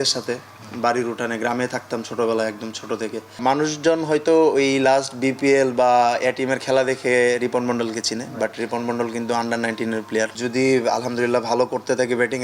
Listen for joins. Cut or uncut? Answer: cut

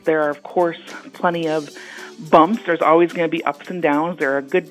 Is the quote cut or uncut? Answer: uncut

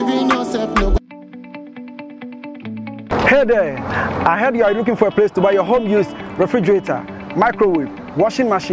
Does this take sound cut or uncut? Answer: cut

